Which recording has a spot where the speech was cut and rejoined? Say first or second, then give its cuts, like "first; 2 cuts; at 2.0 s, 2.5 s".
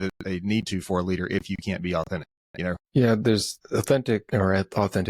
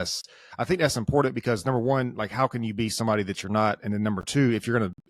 first; 3 cuts; at 2.8 s, 3.5 s, 4.3 s